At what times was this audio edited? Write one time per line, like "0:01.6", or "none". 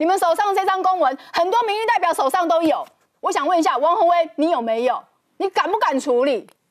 none